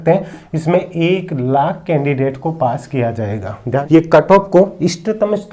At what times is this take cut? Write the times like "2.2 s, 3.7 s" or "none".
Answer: 3.8 s